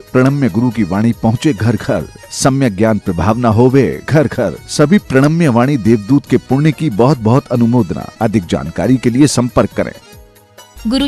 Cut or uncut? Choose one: uncut